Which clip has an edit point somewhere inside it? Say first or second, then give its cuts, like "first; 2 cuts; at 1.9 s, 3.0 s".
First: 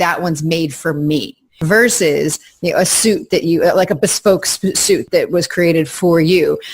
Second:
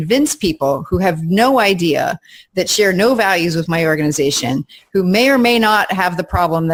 first; 2 cuts; at 1.6 s, 5.0 s